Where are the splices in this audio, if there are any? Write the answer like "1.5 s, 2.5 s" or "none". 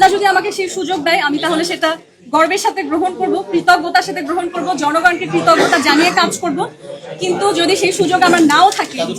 none